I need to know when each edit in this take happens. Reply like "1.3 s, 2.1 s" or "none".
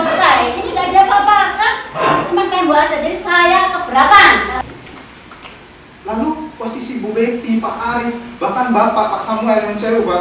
4.6 s